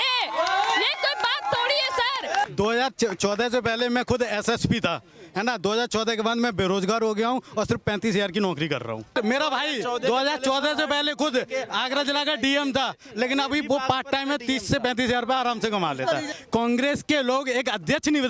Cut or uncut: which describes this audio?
cut